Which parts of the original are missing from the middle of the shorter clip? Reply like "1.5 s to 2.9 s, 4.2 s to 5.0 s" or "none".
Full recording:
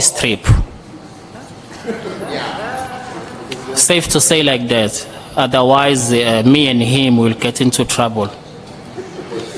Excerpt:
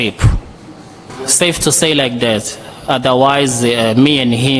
1.3 s to 3.6 s